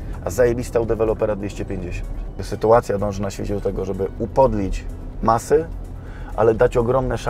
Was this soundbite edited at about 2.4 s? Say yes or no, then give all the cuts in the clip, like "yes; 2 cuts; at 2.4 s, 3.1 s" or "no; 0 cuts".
yes; 1 cut; at 2.4 s